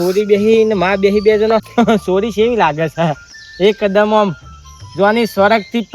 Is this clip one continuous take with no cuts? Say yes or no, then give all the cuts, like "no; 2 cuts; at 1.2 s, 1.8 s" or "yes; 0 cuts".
no; 1 cut; at 1.7 s